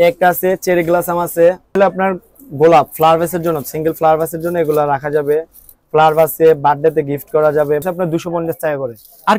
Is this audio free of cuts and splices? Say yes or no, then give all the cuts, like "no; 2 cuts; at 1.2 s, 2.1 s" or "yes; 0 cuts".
no; 2 cuts; at 1.8 s, 7.8 s